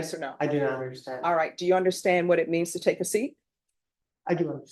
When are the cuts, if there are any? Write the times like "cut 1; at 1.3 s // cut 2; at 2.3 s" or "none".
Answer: none